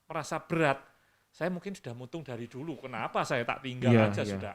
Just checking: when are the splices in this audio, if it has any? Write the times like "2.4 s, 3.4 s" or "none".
none